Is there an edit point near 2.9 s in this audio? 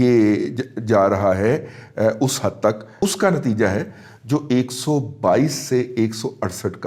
yes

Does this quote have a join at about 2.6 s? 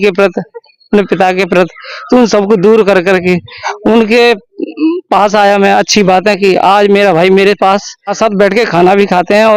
no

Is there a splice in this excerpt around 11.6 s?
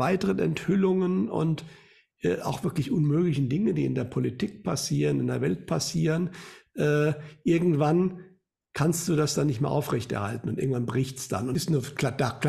yes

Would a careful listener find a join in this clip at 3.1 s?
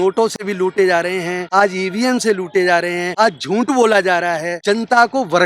yes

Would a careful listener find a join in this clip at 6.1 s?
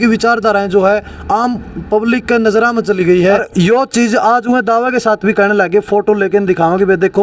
no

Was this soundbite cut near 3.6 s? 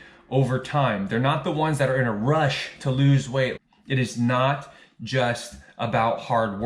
yes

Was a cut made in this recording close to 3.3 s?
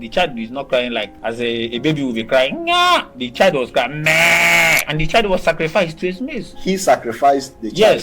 no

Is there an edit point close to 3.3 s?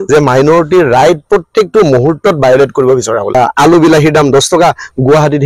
yes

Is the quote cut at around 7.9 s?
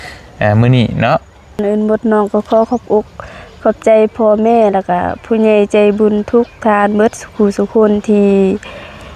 no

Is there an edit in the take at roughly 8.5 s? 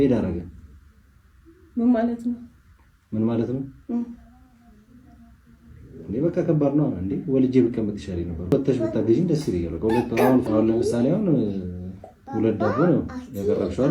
yes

